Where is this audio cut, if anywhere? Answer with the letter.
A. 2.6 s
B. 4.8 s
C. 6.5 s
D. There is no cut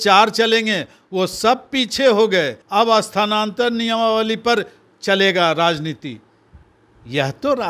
A